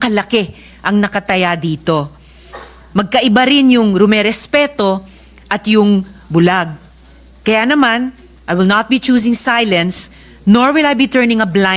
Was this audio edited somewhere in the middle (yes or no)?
no